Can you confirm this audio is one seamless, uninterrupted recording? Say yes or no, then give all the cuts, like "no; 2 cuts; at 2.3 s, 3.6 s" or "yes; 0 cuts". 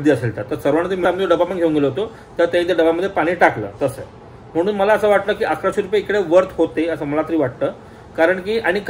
yes; 0 cuts